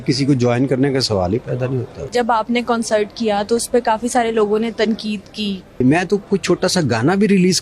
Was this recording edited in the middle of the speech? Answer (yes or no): yes